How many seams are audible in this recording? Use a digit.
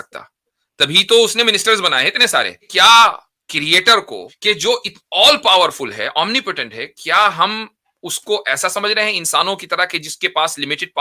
2